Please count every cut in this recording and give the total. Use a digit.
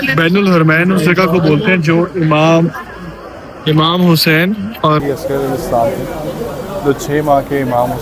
1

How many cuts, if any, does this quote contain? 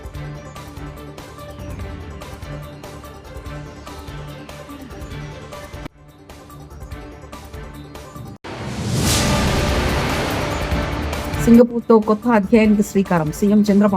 1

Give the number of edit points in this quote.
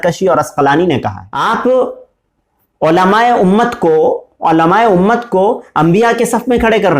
1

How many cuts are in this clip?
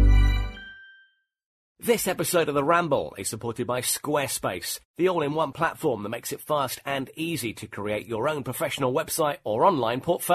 1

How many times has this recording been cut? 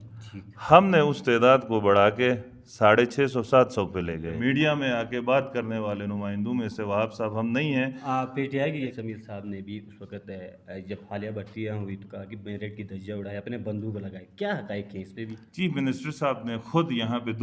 3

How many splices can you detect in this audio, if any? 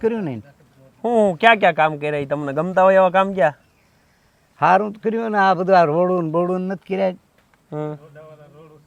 0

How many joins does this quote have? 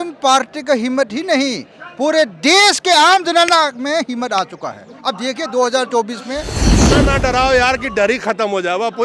1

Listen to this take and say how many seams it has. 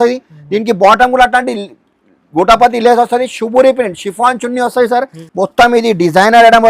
1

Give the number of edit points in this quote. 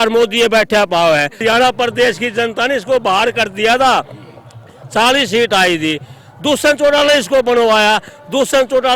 1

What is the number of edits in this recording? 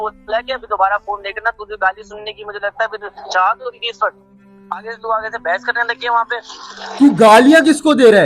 1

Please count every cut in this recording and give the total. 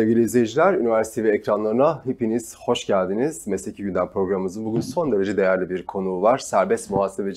0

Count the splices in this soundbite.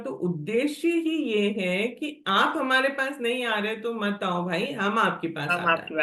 0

